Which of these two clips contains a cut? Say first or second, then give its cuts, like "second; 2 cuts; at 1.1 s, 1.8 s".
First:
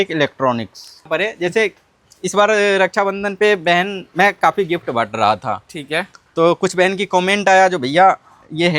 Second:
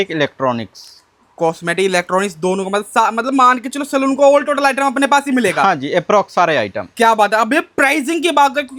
first; 1 cut; at 1.1 s